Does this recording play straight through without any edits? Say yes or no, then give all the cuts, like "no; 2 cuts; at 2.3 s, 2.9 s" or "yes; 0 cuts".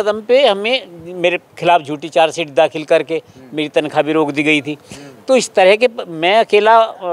yes; 0 cuts